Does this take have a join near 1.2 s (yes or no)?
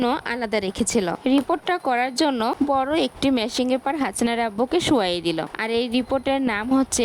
yes